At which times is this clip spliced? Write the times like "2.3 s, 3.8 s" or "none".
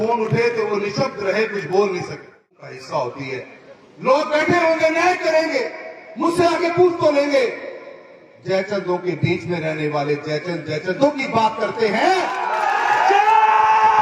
2.7 s